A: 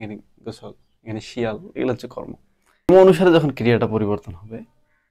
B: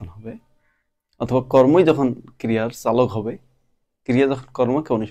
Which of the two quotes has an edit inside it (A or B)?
A